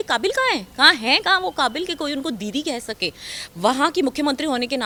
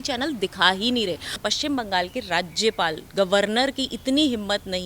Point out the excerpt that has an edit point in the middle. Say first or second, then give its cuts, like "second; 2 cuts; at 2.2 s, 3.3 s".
second; 1 cut; at 1.3 s